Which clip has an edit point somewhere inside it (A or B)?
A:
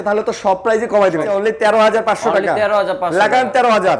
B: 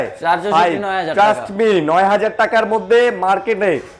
A